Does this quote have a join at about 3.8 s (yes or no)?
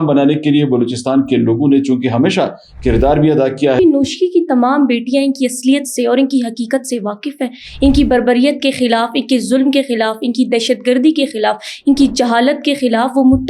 yes